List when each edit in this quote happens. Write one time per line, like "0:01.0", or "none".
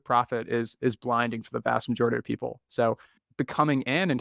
0:03.1